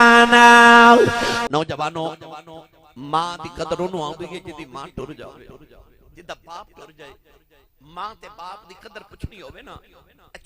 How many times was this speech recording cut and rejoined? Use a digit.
1